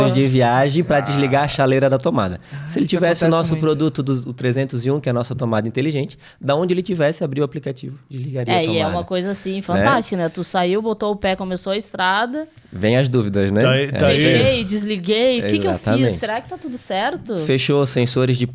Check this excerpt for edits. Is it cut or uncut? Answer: uncut